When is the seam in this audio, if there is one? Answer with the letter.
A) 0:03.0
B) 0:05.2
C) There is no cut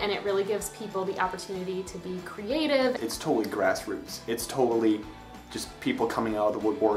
A